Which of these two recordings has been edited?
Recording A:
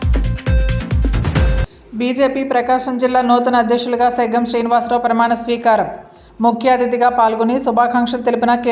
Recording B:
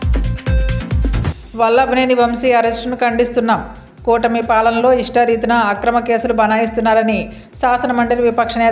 A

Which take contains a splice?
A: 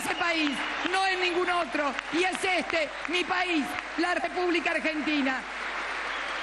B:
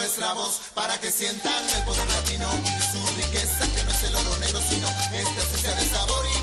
A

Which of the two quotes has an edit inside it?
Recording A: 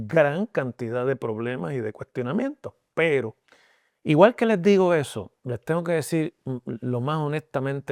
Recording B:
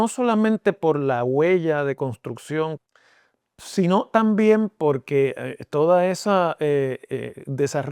B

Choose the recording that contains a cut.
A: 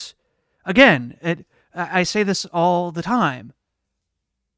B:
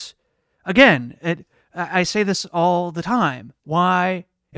B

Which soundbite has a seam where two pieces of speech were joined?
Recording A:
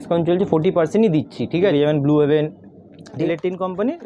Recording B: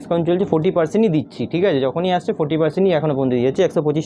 A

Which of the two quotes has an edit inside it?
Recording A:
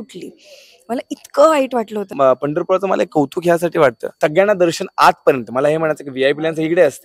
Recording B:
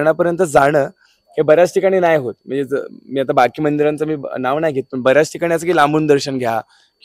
A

